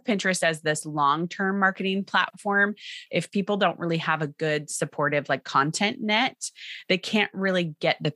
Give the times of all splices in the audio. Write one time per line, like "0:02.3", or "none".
0:02.7

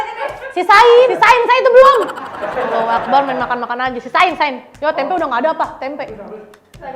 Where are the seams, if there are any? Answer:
0:01.1

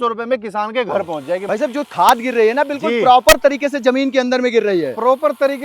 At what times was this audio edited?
0:01.4

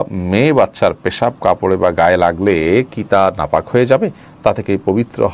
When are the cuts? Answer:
none

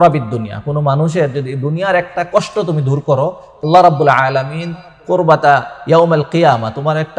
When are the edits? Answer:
0:03.6

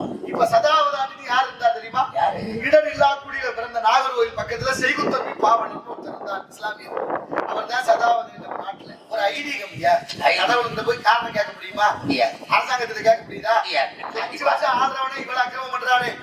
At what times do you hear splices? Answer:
0:09.0
0:14.0

